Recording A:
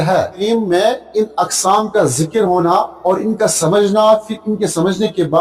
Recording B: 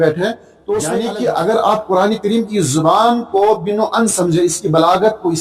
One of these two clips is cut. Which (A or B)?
B